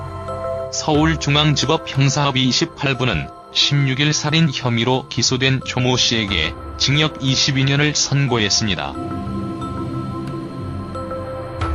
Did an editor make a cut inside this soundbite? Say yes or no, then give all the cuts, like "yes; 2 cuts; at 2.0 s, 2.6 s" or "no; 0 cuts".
yes; 1 cut; at 8.5 s